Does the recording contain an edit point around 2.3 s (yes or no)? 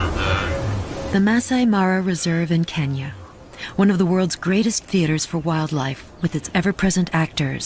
no